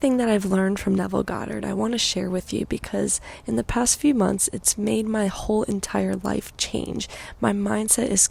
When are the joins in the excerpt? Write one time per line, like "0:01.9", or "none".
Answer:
none